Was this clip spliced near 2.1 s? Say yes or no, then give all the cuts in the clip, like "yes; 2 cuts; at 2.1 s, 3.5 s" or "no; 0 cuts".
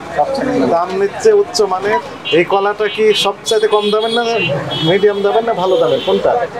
yes; 1 cut; at 2.1 s